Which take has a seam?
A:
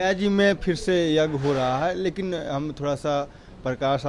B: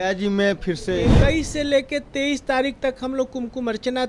B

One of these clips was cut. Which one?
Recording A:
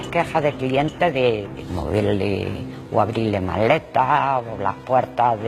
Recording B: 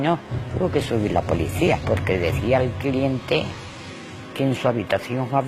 A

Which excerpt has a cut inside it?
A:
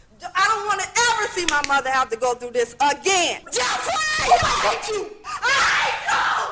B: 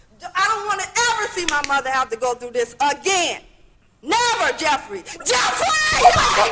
A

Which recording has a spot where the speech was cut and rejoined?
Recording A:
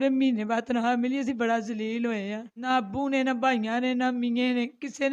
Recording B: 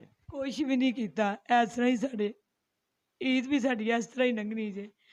A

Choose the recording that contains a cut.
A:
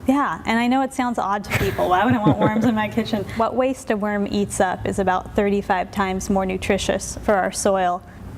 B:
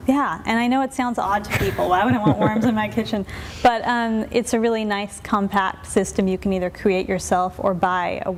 A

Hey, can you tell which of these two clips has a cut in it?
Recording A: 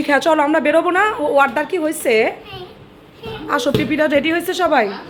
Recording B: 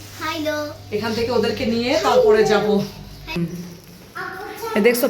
B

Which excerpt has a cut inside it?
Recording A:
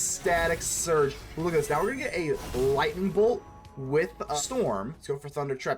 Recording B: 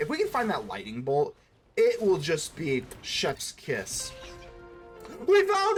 A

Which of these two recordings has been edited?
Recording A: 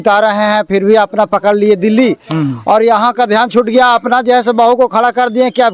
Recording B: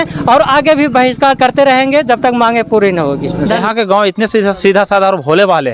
B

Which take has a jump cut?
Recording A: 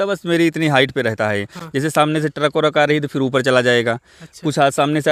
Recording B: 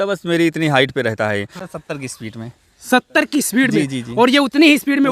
B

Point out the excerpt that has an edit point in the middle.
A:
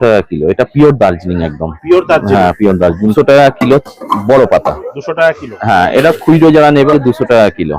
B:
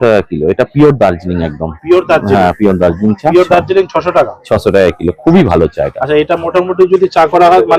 A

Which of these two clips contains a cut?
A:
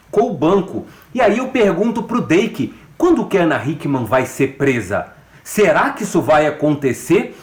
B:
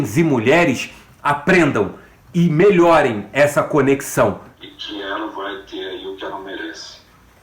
B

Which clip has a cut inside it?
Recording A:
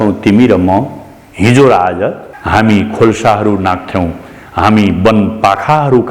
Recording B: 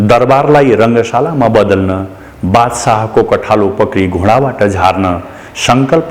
A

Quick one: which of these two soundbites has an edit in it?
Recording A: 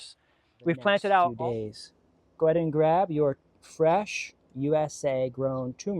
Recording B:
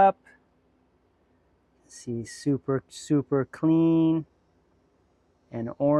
A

